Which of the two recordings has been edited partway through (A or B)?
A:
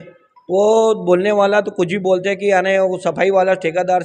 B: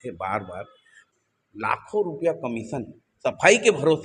B